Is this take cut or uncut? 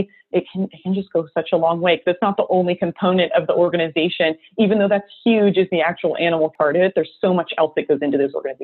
cut